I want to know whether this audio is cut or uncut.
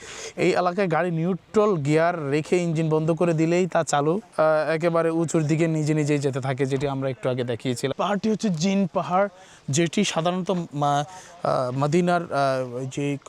cut